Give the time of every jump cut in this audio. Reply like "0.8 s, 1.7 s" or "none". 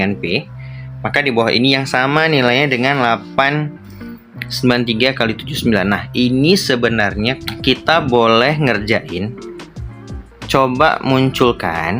7.4 s